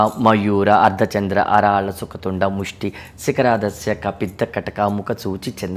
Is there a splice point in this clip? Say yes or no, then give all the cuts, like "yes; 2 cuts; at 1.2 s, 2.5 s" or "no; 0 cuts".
no; 0 cuts